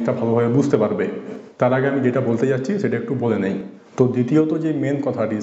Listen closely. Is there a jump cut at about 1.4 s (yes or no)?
no